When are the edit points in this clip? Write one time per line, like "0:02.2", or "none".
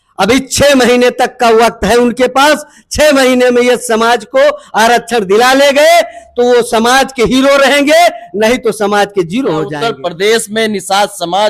0:09.7